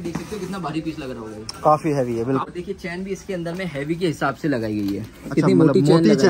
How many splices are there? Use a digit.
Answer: 1